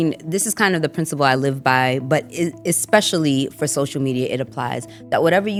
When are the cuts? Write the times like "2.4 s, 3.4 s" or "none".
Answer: none